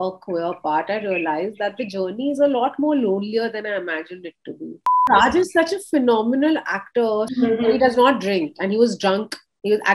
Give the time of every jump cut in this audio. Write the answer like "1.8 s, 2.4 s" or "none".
5.0 s, 7.3 s